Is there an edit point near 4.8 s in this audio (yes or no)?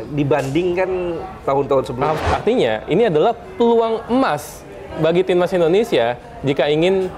no